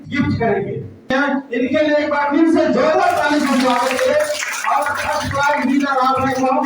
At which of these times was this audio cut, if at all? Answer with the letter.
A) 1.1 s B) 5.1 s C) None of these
A